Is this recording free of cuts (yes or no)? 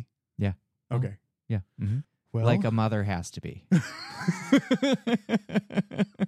yes